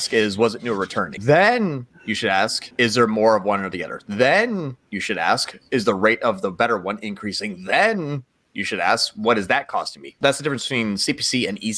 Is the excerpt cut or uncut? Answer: cut